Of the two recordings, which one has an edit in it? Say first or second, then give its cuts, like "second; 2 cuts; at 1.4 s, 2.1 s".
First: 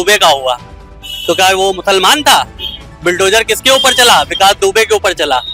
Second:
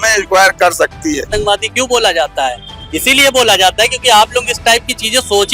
second; 1 cut; at 1.3 s